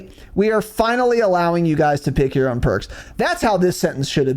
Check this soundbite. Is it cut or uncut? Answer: uncut